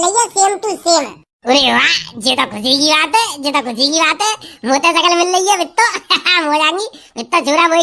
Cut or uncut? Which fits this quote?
uncut